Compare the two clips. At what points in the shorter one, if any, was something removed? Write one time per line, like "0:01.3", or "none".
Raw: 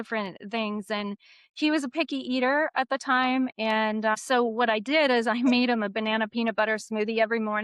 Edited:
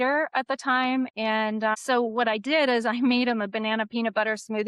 none